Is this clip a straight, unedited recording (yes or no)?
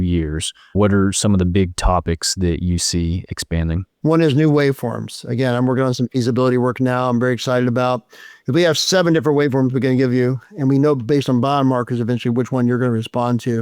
no